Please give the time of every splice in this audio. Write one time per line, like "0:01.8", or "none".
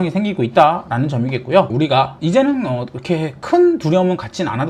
0:01.7